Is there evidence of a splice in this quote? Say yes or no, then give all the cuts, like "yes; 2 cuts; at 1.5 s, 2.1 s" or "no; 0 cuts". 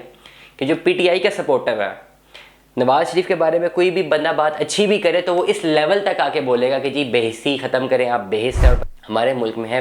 yes; 1 cut; at 8.8 s